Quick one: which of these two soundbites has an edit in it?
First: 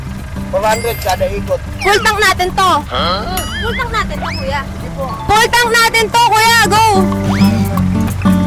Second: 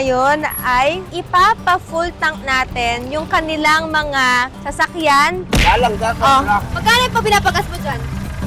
second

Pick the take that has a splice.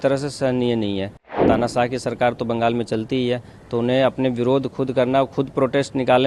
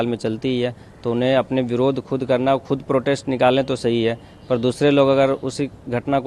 first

